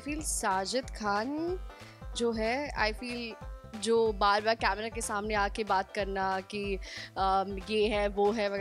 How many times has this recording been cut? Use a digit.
0